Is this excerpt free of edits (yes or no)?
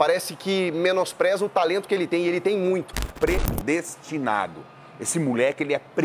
no